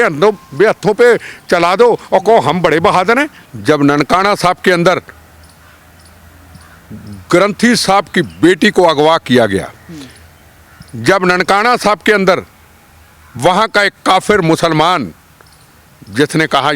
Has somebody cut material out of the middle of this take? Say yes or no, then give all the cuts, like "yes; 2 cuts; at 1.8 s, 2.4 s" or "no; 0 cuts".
yes; 1 cut; at 3.4 s